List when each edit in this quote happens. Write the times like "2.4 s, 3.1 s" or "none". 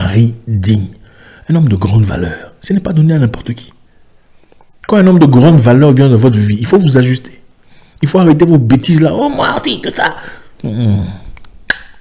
none